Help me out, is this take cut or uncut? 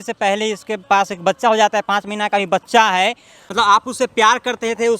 cut